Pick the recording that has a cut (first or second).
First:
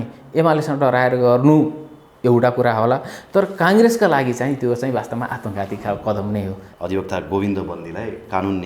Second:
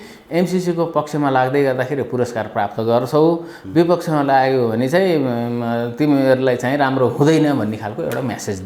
first